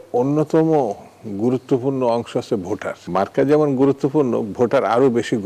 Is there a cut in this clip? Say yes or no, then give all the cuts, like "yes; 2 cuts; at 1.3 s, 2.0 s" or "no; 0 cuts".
yes; 1 cut; at 3.0 s